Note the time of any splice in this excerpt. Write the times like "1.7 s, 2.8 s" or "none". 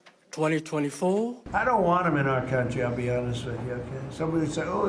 1.4 s